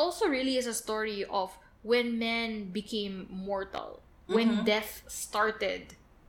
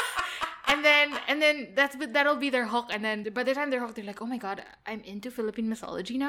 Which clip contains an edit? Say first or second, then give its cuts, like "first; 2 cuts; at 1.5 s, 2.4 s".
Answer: second; 1 cut; at 3.2 s